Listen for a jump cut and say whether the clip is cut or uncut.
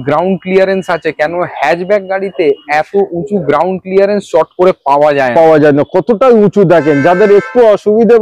uncut